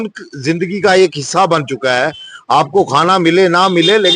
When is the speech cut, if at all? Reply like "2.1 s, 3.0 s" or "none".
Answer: none